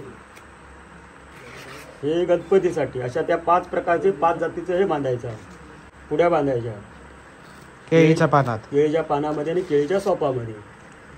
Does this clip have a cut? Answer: no; 0 cuts

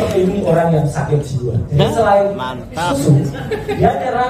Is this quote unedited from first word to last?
no; 1 cut; at 1.6 s

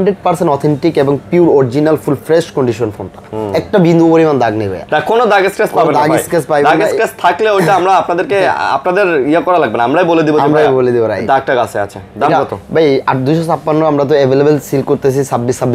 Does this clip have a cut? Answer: no; 0 cuts

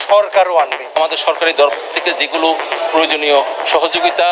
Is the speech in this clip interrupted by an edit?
yes; 1 cut; at 1.0 s

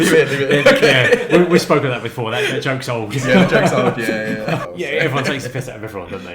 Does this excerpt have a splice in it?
yes; 1 cut; at 4.6 s

